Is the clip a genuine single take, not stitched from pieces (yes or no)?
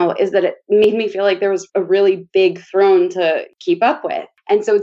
no